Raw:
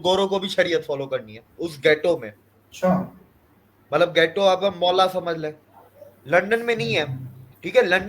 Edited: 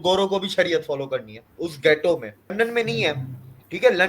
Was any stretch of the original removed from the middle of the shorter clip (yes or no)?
yes